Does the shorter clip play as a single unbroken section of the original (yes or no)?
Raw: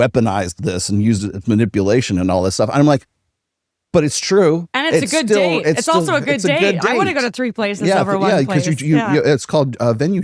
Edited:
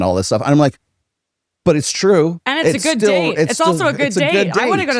yes